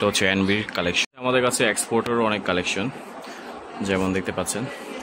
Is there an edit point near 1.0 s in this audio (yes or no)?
yes